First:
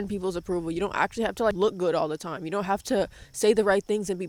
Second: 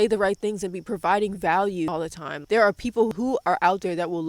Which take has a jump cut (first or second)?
second